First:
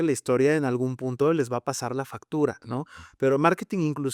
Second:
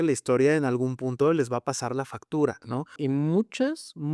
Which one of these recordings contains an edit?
second; 1 cut; at 3.0 s

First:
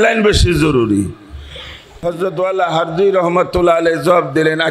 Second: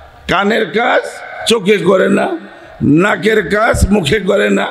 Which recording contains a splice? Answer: first; 1 cut; at 2.0 s

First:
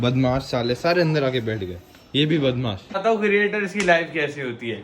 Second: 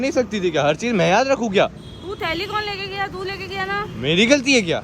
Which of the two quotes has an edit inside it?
first; 1 cut; at 2.8 s

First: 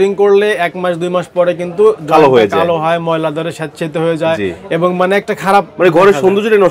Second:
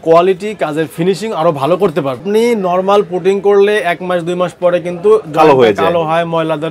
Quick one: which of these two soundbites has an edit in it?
second; 1 cut; at 2.2 s

